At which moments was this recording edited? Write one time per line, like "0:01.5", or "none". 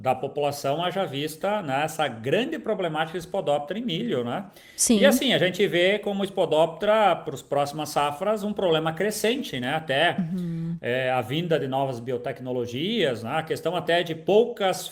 none

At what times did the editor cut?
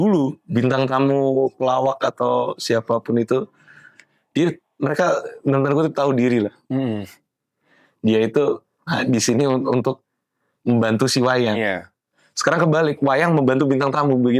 none

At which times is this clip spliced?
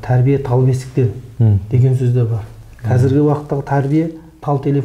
0:01.2

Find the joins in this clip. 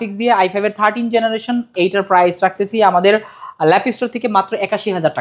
none

